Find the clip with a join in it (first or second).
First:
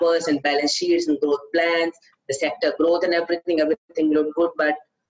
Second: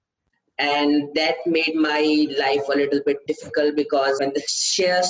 second